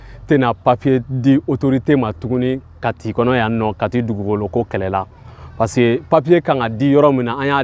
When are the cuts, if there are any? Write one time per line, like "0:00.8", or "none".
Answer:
none